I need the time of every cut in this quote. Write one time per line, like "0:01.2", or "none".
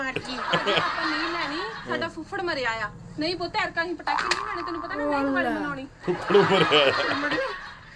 none